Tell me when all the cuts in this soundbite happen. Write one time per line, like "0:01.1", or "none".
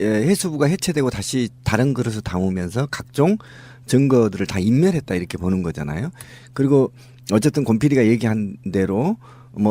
0:03.1